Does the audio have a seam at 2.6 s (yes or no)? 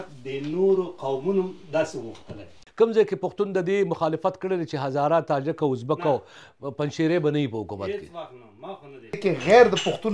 yes